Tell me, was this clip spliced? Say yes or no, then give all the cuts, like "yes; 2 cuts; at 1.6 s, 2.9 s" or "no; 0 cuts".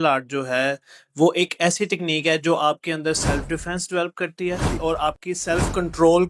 no; 0 cuts